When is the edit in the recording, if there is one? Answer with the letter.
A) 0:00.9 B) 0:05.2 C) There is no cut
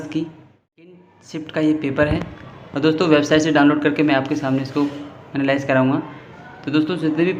A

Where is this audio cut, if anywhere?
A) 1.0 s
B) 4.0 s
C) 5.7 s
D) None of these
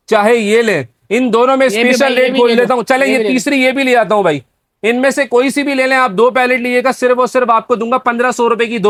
D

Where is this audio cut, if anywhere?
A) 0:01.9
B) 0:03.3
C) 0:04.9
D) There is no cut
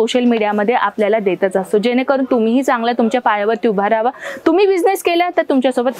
D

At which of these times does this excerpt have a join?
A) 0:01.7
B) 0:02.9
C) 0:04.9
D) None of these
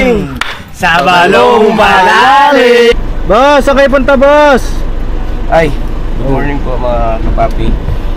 B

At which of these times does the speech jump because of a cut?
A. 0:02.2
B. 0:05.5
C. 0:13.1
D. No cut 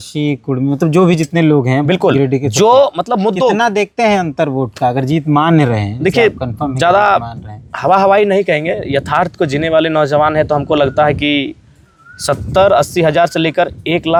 D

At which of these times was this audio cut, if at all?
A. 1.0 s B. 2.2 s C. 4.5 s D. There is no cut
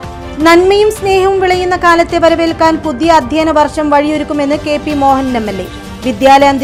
D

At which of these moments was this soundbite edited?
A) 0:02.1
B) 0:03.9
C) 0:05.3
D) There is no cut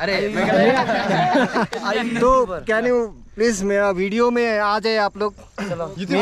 D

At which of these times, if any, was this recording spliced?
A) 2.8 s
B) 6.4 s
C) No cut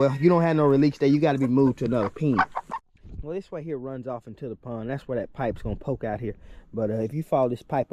A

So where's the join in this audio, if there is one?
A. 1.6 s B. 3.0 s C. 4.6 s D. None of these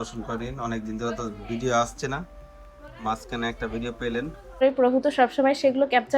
C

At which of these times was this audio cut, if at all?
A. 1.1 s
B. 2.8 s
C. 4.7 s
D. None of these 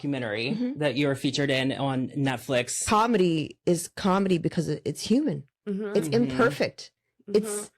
B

